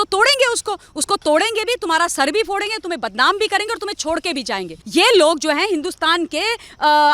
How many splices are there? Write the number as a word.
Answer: one